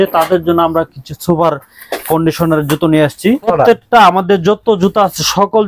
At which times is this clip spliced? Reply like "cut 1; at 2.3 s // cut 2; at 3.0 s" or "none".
cut 1; at 3.5 s

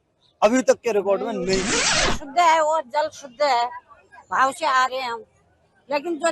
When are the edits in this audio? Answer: cut 1; at 2.1 s

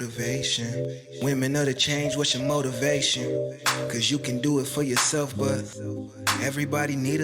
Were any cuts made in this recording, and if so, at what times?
none

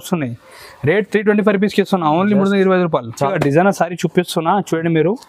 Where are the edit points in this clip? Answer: cut 1; at 3.3 s

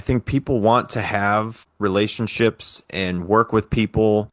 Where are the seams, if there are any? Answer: cut 1; at 1.6 s

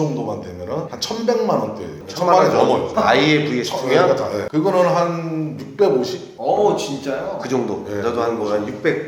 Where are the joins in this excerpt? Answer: cut 1; at 0.9 s // cut 2; at 2.9 s // cut 3; at 4.4 s

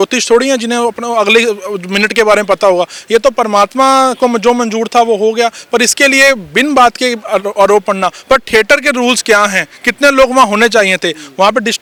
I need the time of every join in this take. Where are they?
none

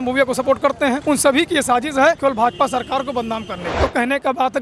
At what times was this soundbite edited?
cut 1; at 1.0 s // cut 2; at 2.2 s // cut 3; at 3.8 s

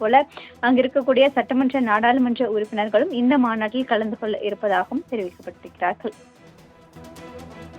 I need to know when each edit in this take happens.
cut 1; at 6.8 s

